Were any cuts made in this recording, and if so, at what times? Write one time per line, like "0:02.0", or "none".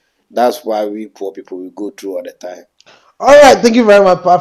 none